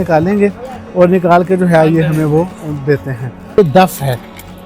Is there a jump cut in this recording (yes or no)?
yes